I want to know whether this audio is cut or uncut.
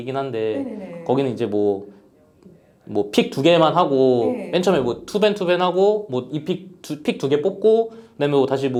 uncut